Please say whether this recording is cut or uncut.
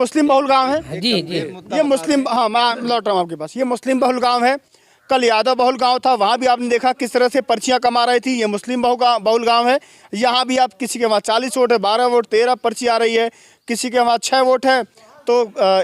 uncut